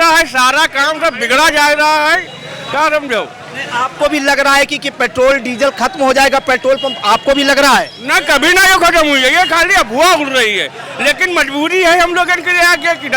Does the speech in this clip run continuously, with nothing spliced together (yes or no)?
yes